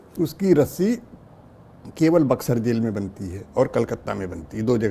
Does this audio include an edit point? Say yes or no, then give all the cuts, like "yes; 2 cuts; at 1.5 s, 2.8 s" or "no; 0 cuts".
no; 0 cuts